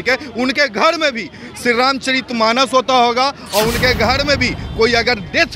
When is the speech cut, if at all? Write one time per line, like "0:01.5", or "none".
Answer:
none